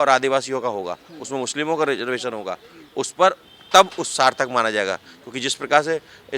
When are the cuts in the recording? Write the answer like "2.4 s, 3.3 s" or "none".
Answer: none